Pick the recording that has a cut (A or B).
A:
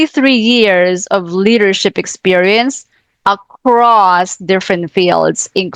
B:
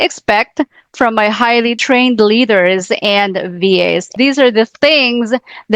B